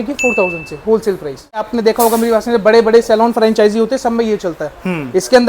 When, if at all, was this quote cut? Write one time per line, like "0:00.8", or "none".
0:01.6